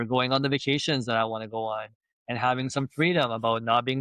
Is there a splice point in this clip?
no; 0 cuts

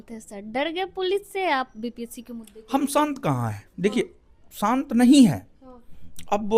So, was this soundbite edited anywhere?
no; 0 cuts

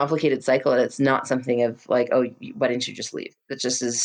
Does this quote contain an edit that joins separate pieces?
no; 0 cuts

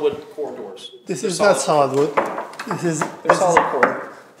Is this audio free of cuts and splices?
yes; 0 cuts

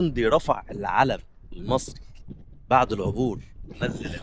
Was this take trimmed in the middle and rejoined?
no; 0 cuts

